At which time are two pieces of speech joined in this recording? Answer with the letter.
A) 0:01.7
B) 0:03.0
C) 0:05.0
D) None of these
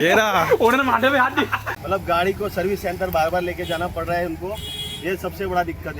A